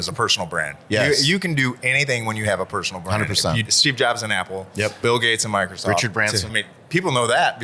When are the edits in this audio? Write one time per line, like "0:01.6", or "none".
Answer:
0:03.7
0:05.0
0:06.5